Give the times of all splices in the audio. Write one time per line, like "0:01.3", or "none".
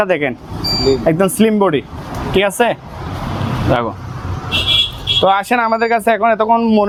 none